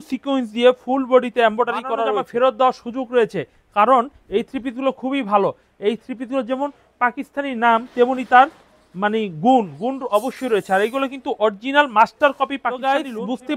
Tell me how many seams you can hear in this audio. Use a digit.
2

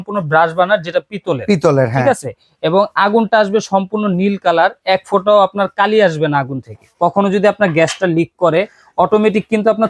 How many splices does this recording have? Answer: 1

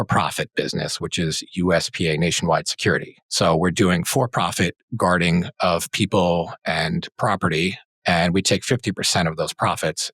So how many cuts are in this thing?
1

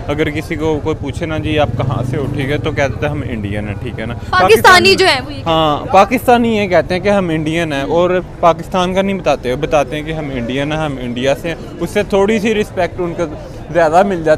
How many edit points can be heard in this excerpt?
0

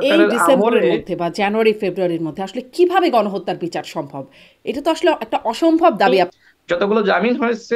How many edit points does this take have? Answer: 1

